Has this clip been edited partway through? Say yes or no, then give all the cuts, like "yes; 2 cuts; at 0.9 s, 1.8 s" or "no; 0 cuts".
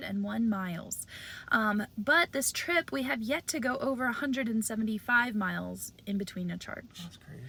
no; 0 cuts